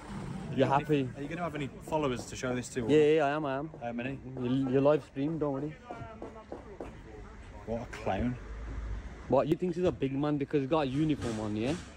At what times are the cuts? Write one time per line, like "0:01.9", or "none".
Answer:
0:09.5